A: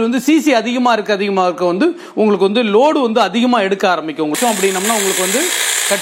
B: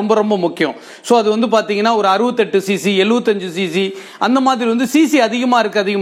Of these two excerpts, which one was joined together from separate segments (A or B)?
A